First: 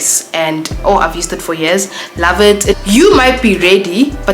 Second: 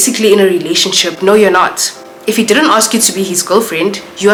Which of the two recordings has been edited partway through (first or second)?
first